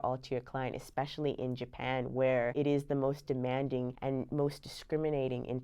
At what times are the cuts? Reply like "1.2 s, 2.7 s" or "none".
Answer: 2.5 s, 4.0 s